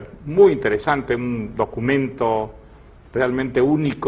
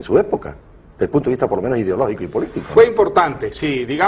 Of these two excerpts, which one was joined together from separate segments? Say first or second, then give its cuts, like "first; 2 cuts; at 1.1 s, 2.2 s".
first; 1 cut; at 1.0 s